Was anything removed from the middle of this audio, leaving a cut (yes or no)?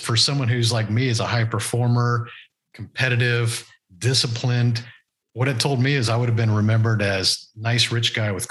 no